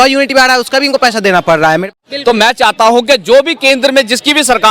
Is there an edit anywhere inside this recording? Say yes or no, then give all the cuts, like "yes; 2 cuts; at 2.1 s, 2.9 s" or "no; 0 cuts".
yes; 1 cut; at 1.8 s